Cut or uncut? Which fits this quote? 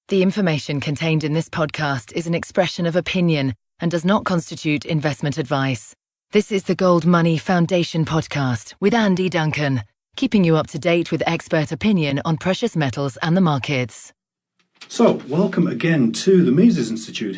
uncut